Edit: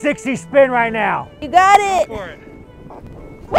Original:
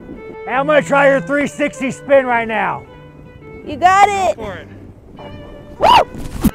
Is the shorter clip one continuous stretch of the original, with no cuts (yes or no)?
no